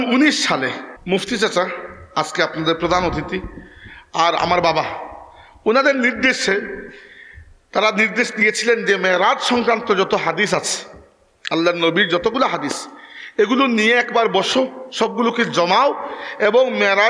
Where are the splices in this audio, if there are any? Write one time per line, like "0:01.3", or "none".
0:00.9